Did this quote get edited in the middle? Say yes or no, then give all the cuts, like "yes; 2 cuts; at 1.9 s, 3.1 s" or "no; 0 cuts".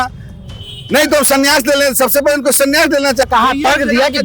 yes; 1 cut; at 3.3 s